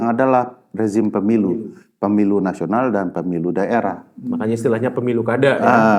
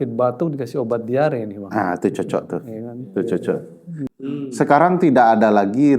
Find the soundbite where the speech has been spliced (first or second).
second